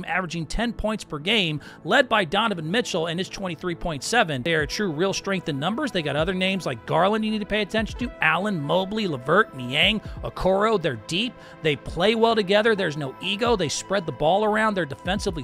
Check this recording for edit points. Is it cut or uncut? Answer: cut